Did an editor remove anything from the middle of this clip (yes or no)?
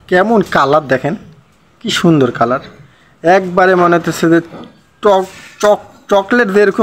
no